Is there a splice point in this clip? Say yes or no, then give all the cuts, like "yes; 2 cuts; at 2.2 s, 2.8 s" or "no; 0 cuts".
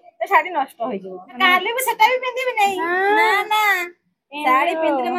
yes; 1 cut; at 1.4 s